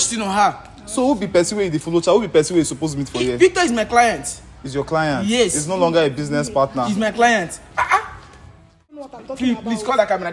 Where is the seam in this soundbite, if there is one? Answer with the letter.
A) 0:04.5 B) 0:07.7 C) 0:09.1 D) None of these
C